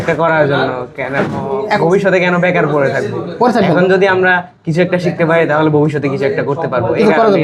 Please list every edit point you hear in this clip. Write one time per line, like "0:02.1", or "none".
none